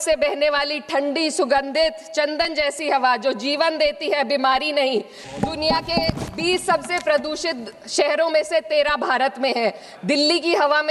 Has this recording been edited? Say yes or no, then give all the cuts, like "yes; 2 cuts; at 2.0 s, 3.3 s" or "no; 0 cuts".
yes; 1 cut; at 5.3 s